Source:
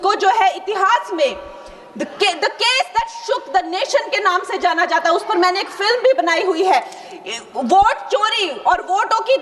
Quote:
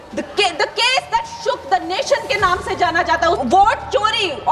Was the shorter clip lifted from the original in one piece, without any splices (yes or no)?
no